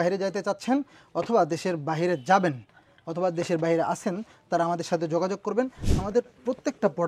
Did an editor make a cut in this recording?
no; 0 cuts

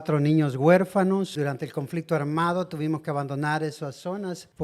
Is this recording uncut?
no; 1 cut; at 1.3 s

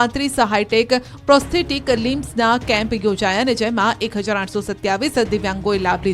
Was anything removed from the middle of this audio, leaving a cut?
yes; 1 cut; at 4.0 s

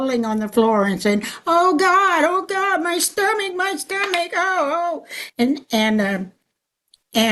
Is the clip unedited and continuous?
yes; 0 cuts

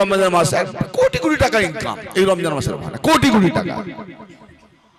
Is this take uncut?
yes; 0 cuts

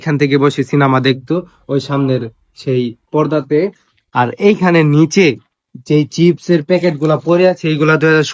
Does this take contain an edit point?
no; 0 cuts

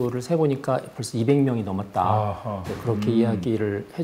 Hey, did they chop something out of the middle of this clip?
no; 0 cuts

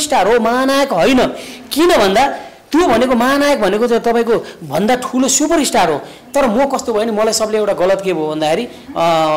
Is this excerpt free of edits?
yes; 0 cuts

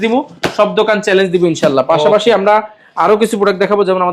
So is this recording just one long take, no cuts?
yes; 0 cuts

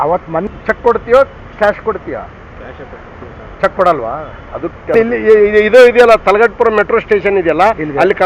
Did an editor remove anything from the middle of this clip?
no; 0 cuts

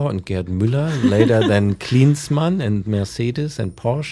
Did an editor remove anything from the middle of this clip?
no; 0 cuts

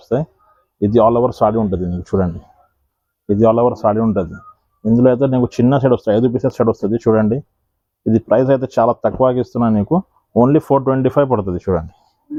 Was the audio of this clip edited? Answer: no; 0 cuts

